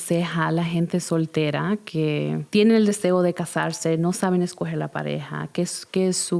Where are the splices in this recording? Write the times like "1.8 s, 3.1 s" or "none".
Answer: none